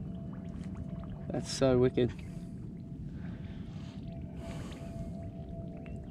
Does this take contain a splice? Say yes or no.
no